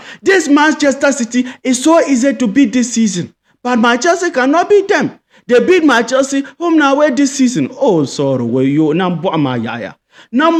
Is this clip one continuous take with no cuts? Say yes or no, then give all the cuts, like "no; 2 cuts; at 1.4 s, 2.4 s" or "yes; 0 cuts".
yes; 0 cuts